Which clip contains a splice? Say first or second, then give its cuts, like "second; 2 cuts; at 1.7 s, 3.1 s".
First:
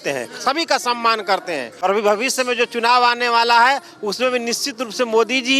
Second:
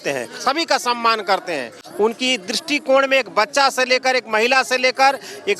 first; 1 cut; at 1.8 s